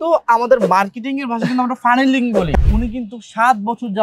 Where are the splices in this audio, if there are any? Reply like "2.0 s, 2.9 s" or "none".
2.5 s